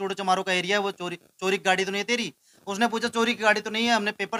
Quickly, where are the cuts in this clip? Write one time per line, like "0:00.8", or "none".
none